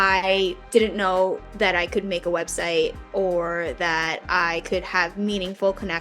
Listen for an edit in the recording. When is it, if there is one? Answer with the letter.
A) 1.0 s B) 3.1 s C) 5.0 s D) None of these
D